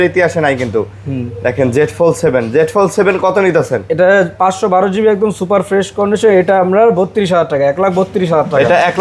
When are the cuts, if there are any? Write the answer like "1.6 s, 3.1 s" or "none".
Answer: none